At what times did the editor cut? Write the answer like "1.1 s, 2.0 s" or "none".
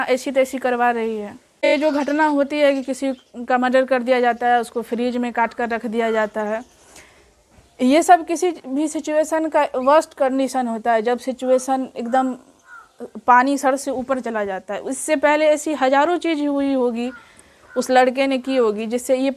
1.6 s